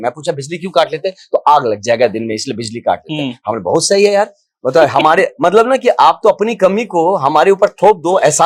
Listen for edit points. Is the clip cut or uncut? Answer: uncut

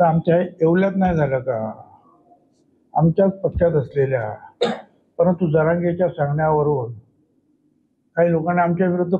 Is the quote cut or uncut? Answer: uncut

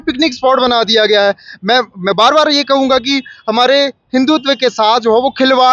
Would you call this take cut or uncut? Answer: uncut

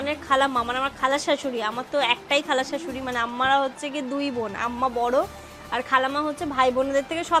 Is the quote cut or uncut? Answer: uncut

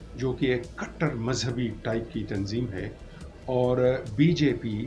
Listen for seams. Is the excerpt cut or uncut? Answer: uncut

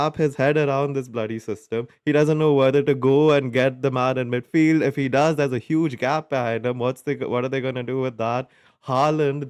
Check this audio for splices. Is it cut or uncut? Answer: uncut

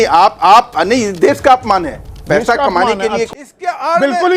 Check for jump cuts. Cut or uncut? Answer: cut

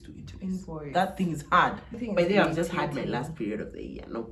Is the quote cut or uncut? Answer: cut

